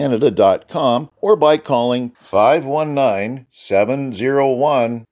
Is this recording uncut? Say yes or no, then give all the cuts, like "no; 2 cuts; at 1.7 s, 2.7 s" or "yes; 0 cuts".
no; 1 cut; at 1.1 s